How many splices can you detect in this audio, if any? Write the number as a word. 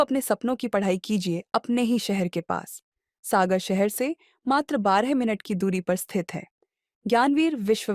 zero